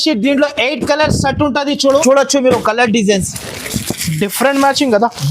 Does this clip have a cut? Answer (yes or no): yes